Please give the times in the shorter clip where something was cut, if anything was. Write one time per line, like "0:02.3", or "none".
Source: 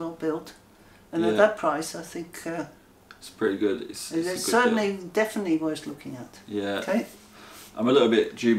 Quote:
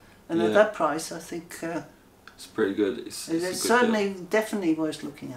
none